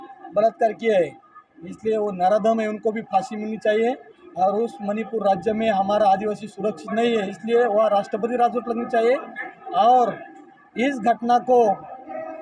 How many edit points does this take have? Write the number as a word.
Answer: zero